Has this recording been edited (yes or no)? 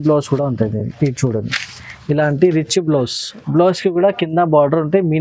no